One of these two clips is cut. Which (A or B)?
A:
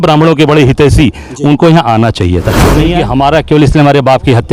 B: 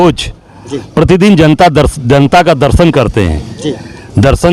A